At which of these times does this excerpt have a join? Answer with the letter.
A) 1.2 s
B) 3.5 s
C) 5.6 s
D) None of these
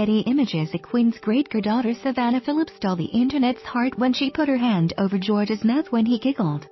A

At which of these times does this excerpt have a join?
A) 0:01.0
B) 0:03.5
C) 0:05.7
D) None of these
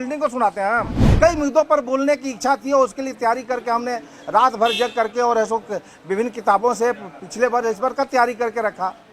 A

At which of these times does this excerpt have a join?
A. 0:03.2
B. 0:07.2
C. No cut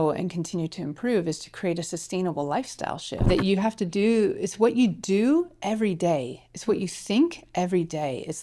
A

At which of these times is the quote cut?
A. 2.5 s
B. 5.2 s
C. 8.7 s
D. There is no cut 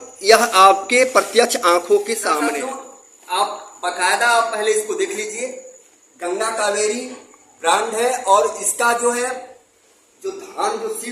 A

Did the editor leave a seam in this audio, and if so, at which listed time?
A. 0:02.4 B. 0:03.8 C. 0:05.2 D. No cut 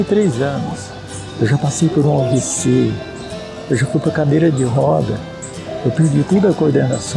D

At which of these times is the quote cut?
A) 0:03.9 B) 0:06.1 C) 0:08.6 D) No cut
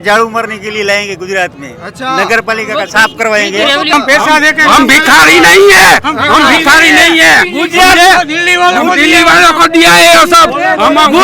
A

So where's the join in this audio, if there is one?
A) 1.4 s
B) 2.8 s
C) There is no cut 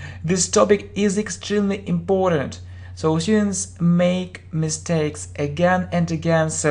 A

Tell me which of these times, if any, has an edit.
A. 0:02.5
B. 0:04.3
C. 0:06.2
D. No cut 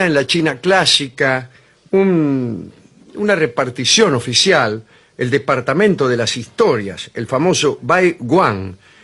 B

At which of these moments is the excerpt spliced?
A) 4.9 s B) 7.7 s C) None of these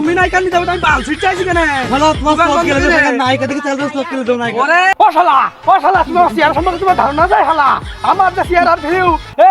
A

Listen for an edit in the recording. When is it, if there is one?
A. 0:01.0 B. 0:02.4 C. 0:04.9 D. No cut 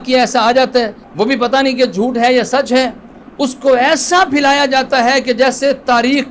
A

